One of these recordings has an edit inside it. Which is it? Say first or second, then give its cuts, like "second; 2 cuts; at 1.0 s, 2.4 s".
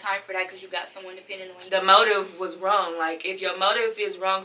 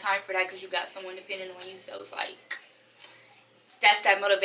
first; 1 cut; at 1.5 s